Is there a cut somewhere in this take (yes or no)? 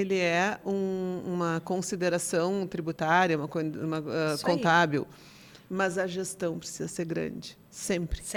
no